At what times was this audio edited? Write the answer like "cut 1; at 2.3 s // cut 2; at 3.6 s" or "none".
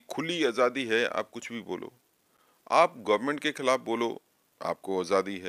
none